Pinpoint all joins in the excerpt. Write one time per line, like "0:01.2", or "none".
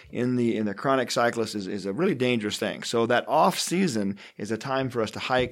none